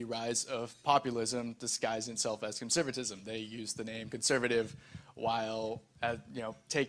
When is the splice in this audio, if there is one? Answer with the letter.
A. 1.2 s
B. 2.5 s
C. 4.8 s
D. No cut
D